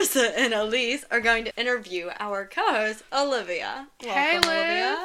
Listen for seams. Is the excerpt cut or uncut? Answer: cut